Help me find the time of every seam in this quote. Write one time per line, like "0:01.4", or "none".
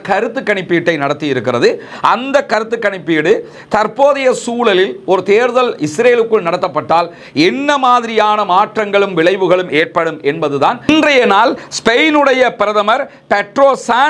0:10.8